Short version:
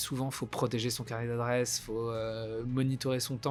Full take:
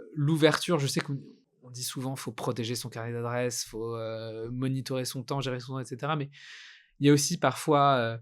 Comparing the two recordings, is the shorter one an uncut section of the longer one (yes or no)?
yes